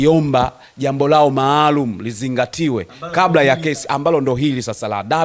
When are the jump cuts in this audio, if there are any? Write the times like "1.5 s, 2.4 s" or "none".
none

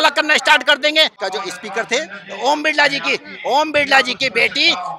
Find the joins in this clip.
1.2 s

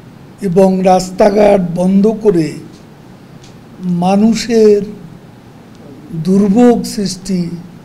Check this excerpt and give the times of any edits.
none

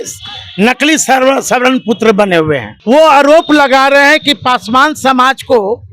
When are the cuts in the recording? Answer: 2.7 s

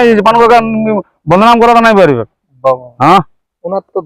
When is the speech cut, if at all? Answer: 2.9 s

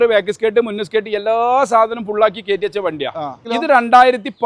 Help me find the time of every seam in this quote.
3.4 s

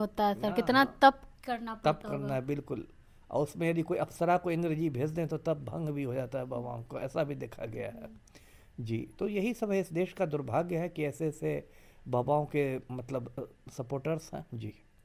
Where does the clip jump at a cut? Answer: none

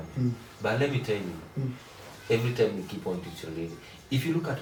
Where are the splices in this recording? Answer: none

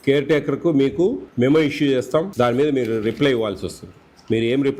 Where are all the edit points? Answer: 1.2 s, 2.3 s

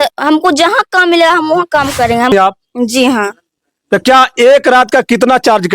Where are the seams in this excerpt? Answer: 2.3 s

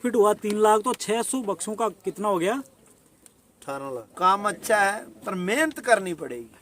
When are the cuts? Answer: 4.1 s

